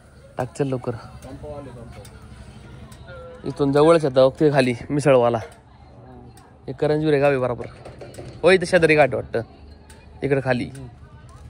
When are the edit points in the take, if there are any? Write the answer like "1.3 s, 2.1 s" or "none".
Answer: none